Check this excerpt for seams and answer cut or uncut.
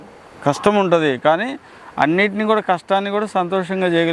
uncut